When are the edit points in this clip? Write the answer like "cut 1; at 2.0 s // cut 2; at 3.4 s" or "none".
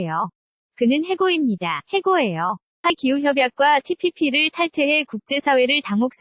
cut 1; at 2.9 s